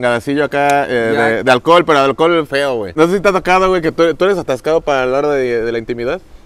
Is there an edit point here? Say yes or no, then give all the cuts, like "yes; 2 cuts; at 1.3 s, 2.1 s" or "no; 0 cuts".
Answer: yes; 1 cut; at 3.0 s